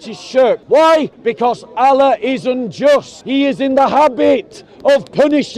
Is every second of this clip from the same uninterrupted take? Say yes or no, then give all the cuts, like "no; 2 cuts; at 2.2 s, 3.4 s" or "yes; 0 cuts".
no; 2 cuts; at 1.1 s, 3.2 s